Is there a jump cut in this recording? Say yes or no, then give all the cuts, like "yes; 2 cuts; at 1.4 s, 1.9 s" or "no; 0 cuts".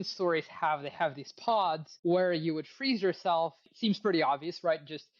yes; 2 cuts; at 1.9 s, 3.7 s